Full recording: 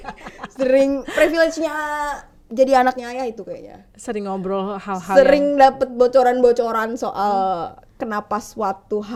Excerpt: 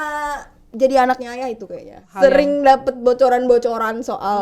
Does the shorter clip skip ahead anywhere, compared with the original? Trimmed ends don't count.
yes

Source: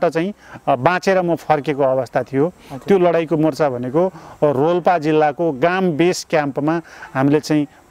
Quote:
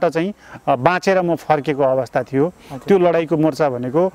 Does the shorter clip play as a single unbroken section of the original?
yes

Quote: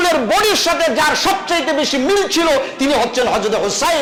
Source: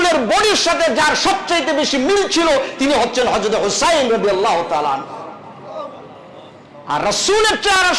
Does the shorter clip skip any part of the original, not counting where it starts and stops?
no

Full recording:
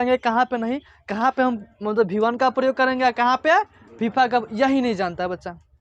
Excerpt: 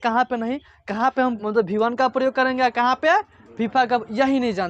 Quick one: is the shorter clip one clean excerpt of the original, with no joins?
no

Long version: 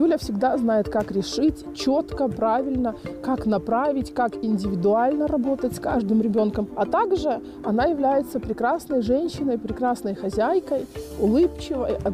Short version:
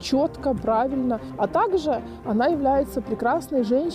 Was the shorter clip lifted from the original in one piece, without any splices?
no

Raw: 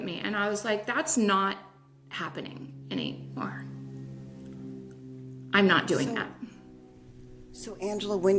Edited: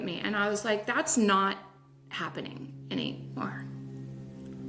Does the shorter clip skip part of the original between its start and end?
no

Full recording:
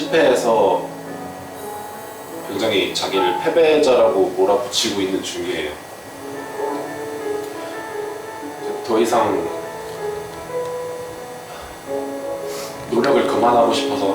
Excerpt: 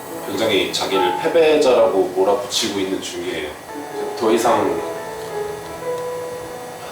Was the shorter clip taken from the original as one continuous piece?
no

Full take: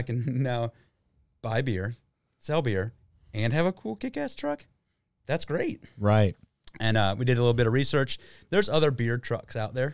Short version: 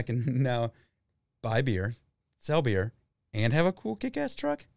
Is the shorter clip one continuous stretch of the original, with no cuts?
yes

